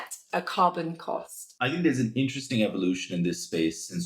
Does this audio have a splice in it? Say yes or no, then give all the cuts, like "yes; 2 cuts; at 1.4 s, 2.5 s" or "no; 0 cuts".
yes; 1 cut; at 1.5 s